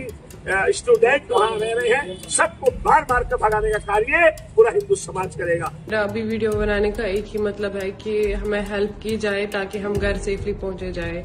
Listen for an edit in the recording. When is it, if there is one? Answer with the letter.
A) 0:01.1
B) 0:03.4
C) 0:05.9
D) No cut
C